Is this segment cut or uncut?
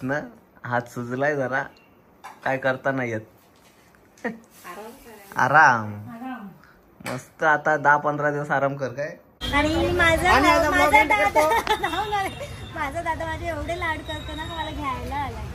cut